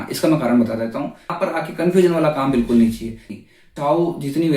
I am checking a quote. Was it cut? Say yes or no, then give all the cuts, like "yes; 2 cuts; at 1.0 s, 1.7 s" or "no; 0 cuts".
yes; 2 cuts; at 1.4 s, 3.3 s